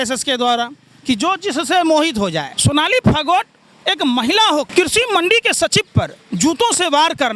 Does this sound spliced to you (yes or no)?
yes